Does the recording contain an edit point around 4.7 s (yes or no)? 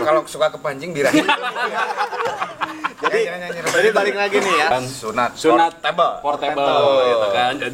yes